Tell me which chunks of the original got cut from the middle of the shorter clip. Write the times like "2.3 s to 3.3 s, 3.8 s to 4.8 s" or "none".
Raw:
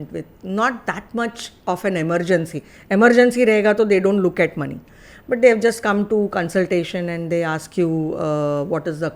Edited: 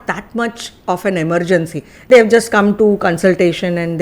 2.9 s to 5.4 s